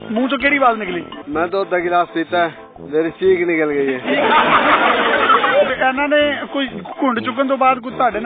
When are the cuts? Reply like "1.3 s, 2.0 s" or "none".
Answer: 5.7 s